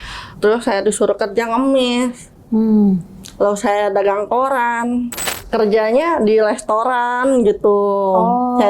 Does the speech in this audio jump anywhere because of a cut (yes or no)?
yes